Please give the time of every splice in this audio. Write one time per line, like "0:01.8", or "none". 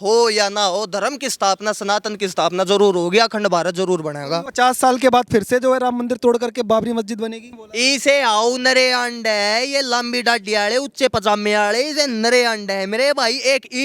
0:04.5
0:07.6